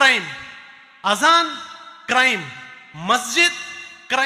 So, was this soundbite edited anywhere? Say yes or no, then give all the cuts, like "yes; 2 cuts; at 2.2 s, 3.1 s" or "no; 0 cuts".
no; 0 cuts